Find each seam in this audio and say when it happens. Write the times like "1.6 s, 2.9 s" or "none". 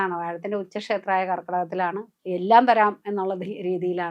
2.1 s